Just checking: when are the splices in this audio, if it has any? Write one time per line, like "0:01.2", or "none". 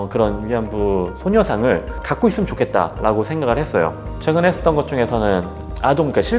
0:04.1